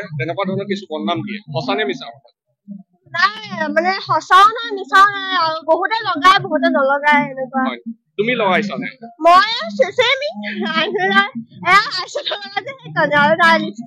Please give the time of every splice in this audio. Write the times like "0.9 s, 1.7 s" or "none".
none